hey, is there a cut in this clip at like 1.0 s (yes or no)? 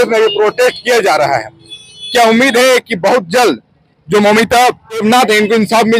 no